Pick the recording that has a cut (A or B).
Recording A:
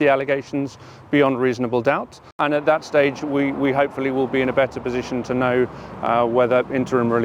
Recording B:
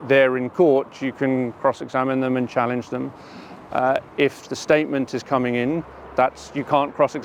A